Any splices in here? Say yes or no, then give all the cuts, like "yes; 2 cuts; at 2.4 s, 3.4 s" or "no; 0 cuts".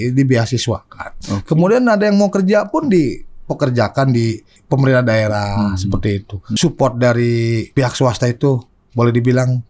yes; 3 cuts; at 4.5 s, 6.4 s, 7.7 s